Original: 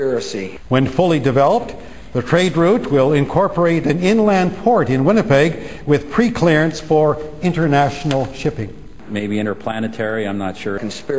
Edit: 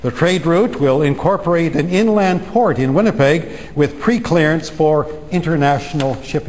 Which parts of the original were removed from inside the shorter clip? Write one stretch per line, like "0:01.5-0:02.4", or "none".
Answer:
none

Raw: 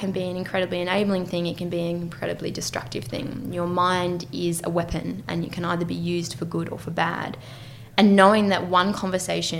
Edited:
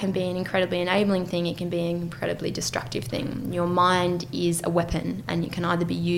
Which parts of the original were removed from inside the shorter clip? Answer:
none

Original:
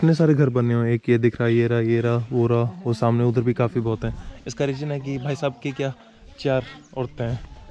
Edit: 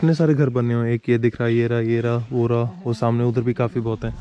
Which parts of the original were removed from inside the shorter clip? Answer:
none

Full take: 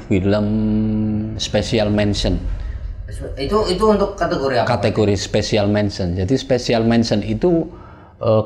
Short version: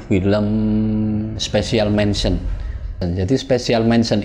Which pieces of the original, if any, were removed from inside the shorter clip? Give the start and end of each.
0:03.0-0:06.0

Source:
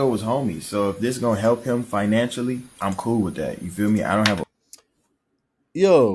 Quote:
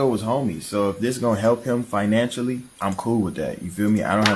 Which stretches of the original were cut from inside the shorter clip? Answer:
none

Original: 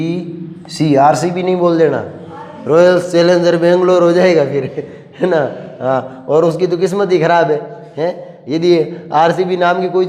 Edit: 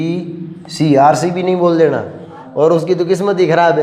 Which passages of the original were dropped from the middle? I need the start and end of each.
0:02.4-0:06.1

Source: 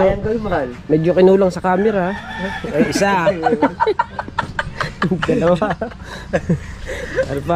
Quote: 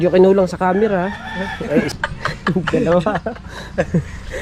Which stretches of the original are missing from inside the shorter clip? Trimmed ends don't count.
0:02.9-0:04.5

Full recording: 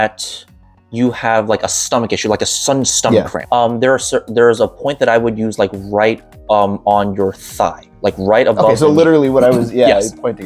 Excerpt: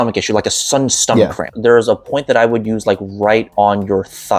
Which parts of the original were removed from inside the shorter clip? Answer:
0:03.5-0:04.2
0:06.2-0:06.8

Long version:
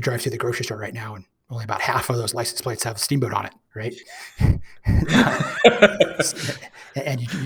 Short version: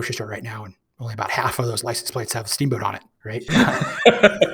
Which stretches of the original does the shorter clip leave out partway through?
0:04.0-0:05.1

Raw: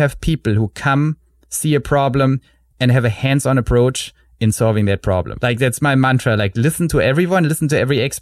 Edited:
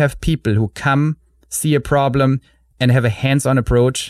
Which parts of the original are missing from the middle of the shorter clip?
none

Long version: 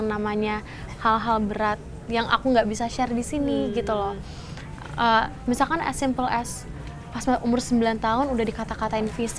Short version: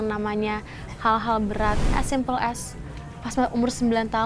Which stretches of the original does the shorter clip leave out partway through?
0:02.0-0:05.9

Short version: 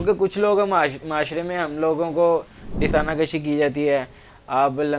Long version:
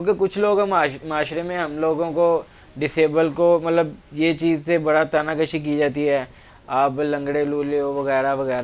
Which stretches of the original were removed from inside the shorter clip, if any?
0:02.9-0:05.1

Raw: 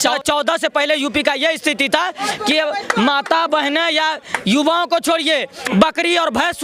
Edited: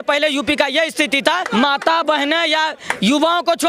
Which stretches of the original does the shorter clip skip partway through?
0:02.1-0:02.9

